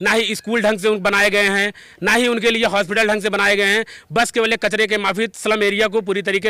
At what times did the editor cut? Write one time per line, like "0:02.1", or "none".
none